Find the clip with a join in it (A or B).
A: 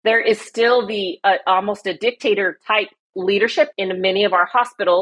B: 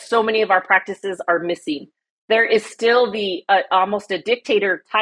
A